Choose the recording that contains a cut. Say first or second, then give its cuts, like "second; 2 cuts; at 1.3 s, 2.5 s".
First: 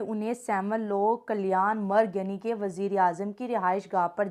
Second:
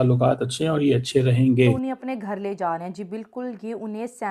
second; 1 cut; at 1.8 s